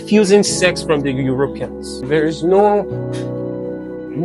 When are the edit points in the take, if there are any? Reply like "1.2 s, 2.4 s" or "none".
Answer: 2.0 s